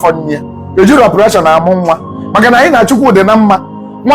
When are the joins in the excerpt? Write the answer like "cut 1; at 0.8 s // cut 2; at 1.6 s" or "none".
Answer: none